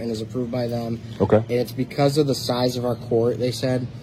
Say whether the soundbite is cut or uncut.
uncut